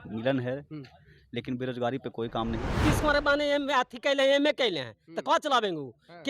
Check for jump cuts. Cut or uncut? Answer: cut